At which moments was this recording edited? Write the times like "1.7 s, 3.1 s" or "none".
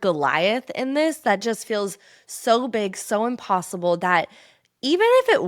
none